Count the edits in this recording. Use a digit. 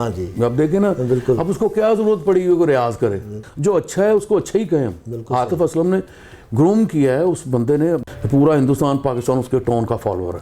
2